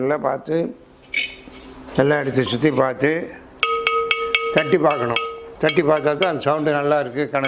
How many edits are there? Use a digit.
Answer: 1